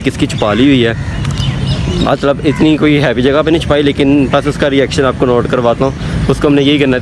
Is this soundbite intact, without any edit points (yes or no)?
yes